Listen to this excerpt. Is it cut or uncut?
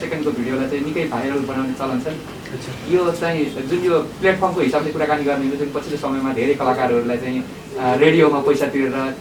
uncut